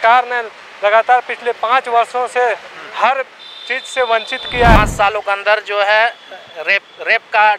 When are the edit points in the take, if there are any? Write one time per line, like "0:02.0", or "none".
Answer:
0:04.8